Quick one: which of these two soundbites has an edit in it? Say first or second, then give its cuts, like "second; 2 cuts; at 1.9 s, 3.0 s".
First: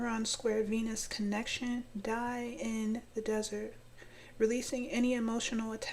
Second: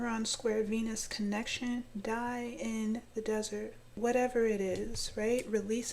second; 1 cut; at 3.8 s